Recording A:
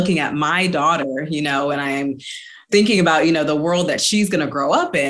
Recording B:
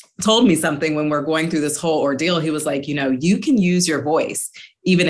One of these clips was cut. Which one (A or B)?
A